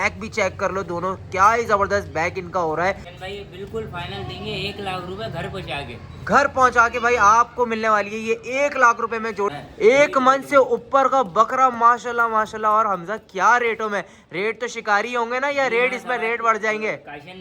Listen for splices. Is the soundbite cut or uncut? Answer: cut